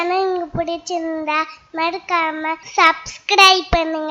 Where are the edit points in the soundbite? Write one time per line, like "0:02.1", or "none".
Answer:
0:02.6